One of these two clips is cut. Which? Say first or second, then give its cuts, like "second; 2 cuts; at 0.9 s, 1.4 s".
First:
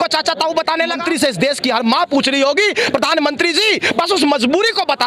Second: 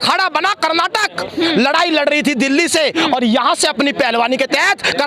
first; 1 cut; at 1.0 s